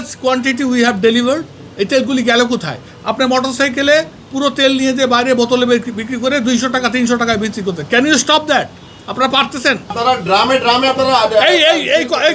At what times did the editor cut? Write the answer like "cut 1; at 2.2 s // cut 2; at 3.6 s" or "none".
cut 1; at 9.9 s